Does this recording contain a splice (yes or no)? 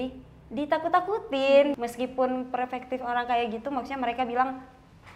yes